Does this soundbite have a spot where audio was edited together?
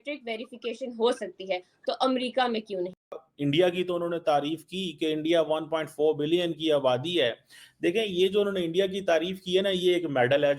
yes; 1 cut; at 3.2 s

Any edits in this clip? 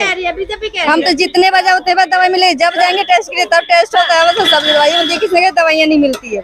no; 0 cuts

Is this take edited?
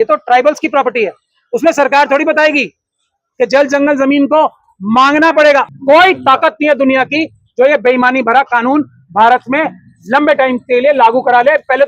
yes; 1 cut; at 5.7 s

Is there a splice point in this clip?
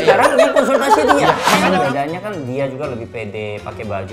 yes; 1 cut; at 1.7 s

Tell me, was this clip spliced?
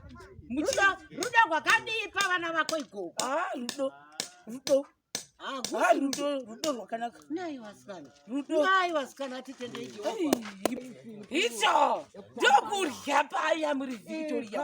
yes; 1 cut; at 10.8 s

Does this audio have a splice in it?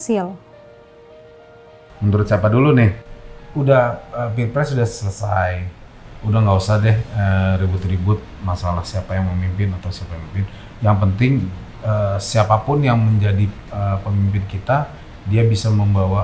yes; 1 cut; at 3.0 s

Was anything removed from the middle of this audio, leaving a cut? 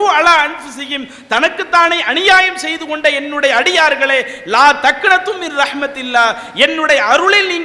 no; 0 cuts

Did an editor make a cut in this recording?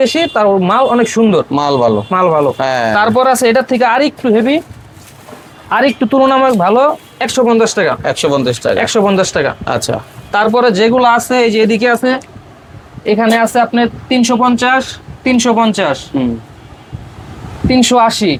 no; 0 cuts

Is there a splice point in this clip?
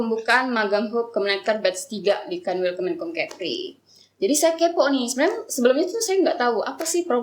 no; 0 cuts

